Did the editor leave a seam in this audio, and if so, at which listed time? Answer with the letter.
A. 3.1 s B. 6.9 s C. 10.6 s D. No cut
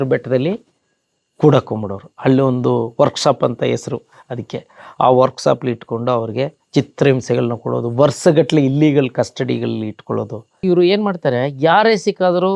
C